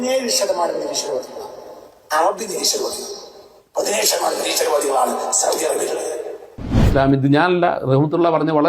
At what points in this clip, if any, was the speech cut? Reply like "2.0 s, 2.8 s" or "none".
6.8 s